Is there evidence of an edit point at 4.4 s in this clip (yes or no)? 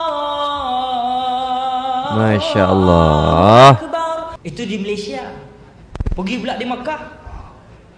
yes